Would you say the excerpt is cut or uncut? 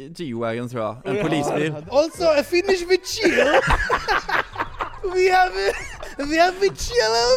cut